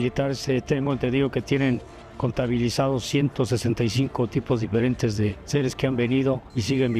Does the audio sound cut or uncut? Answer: uncut